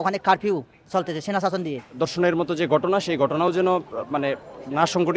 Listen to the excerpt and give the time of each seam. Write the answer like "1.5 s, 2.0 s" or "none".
1.8 s